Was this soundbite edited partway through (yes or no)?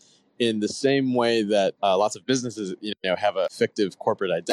yes